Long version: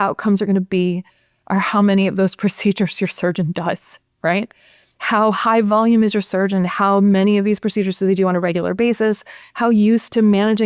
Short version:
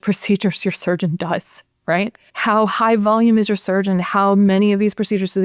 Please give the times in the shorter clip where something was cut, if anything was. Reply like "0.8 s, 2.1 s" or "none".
2.3 s